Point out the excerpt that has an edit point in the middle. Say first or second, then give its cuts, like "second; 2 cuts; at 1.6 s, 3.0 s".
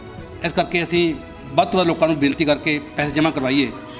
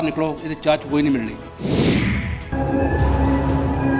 second; 1 cut; at 1.5 s